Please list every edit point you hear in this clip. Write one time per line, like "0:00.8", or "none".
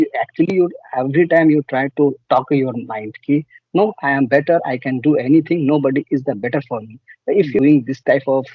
0:07.6